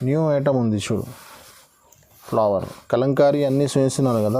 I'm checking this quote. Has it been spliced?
no; 0 cuts

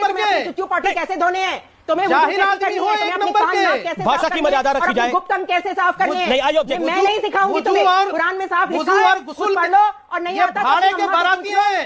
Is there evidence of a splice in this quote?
no; 0 cuts

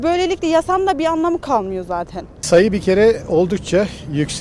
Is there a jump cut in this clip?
yes; 1 cut; at 2.3 s

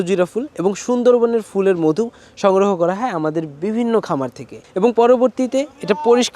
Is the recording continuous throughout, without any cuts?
no; 1 cut; at 4.5 s

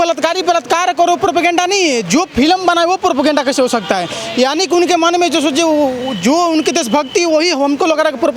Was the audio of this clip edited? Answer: no; 0 cuts

